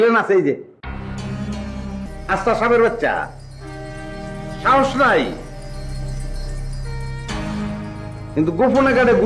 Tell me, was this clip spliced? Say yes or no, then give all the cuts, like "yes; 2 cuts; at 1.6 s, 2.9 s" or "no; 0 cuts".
yes; 1 cut; at 2.1 s